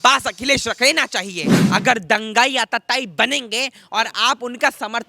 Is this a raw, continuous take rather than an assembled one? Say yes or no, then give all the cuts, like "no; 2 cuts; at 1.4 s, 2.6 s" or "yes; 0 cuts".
no; 1 cut; at 1.5 s